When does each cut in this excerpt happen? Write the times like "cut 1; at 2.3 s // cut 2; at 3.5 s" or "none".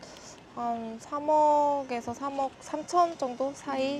none